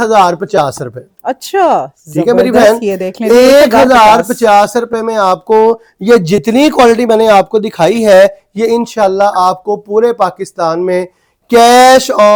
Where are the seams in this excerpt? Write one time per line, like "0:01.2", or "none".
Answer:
none

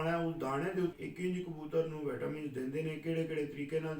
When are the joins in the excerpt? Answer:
0:00.9

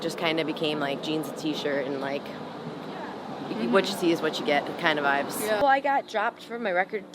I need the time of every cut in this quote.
0:05.6

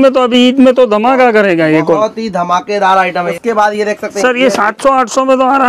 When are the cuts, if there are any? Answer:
0:03.3

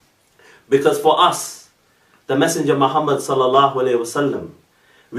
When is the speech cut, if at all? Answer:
0:02.4

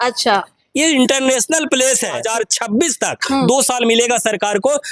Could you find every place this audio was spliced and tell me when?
0:02.2

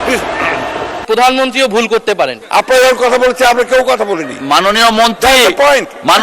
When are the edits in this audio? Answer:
0:01.0
0:02.4

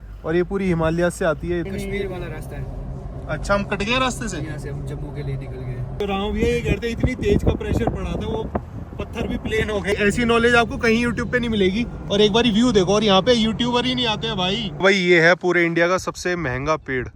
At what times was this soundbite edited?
0:01.7
0:06.0
0:09.9
0:14.7

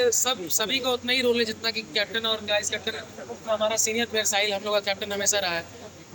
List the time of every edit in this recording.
none

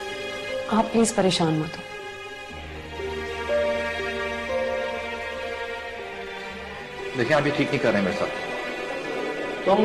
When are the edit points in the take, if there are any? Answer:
none

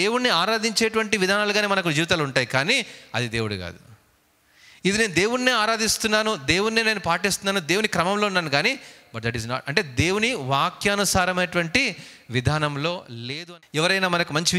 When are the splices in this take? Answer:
0:13.3

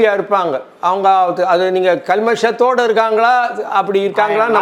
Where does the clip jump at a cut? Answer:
none

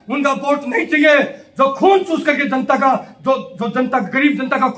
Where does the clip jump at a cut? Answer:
none

